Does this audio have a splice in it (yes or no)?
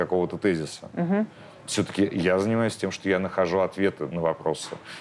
no